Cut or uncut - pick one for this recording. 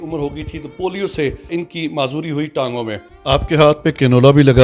cut